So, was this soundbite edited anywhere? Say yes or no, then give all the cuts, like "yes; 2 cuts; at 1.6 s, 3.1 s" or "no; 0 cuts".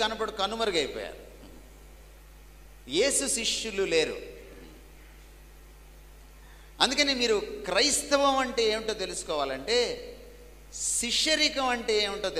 no; 0 cuts